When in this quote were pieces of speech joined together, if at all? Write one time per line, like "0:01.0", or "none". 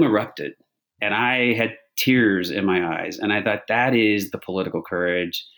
0:01.0